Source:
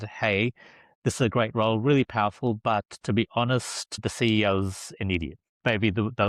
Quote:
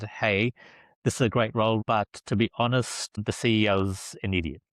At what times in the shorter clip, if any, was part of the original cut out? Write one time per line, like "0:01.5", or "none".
0:01.8